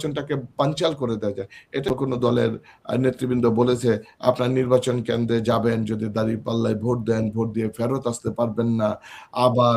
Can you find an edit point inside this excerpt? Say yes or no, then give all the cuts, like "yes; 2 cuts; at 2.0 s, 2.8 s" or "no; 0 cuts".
yes; 1 cut; at 1.9 s